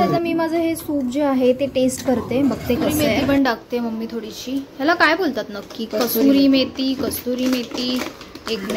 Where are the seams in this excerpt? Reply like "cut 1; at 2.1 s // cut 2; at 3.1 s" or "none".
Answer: cut 1; at 3.1 s